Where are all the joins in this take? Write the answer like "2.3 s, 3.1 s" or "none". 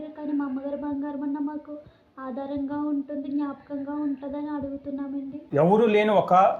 5.4 s

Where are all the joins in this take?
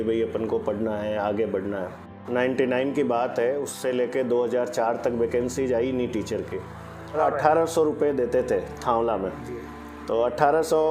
2.1 s, 7.2 s

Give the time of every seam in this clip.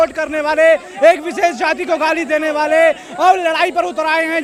none

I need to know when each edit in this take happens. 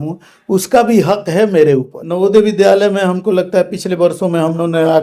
2.0 s

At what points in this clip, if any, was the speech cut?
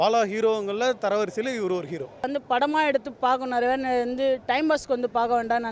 2.3 s

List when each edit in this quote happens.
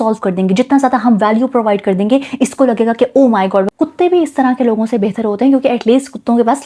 3.7 s

